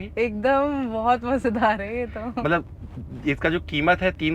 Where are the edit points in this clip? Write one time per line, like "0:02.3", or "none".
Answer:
none